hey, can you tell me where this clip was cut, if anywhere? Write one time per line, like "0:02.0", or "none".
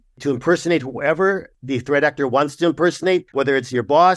0:01.6
0:03.3